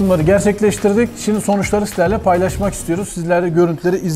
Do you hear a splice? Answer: no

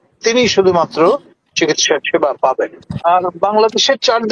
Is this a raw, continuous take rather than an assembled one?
no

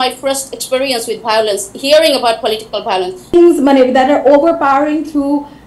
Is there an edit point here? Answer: yes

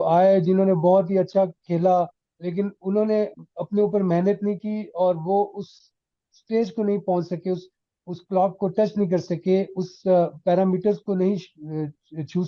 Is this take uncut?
yes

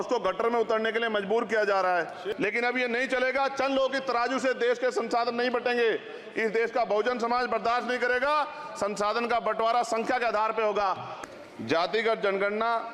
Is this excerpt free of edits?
no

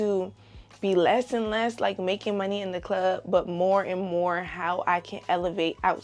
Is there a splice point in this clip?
no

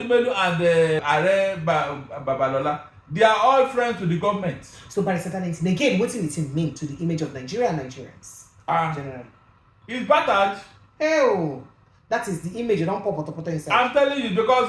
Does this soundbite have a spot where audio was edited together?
yes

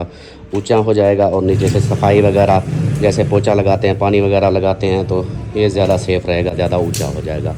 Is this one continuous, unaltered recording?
yes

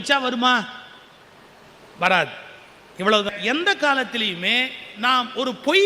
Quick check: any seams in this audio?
yes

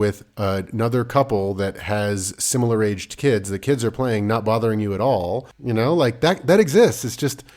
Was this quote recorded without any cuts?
no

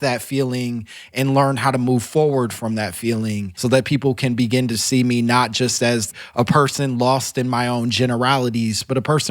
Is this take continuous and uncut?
no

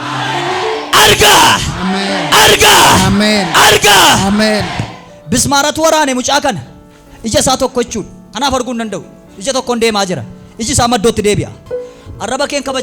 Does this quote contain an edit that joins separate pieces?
yes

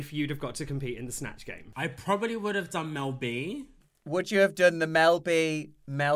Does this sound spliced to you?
yes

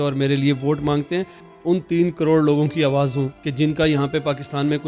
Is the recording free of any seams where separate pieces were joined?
no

